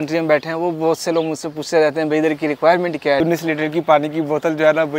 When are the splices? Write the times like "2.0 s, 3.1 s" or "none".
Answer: 3.2 s